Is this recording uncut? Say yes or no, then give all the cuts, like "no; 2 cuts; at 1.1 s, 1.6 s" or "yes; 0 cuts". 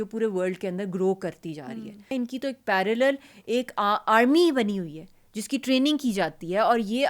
no; 1 cut; at 2.1 s